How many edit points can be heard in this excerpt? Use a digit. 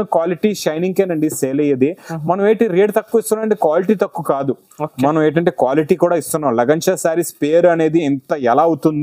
0